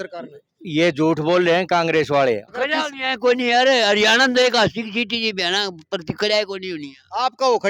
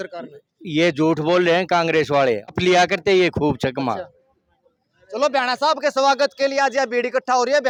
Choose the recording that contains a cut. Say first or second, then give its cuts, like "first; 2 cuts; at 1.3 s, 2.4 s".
first; 1 cut; at 2.5 s